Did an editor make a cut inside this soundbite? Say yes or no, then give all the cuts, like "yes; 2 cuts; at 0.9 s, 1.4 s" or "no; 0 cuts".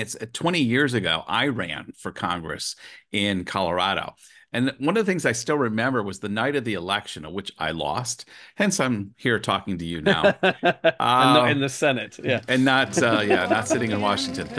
no; 0 cuts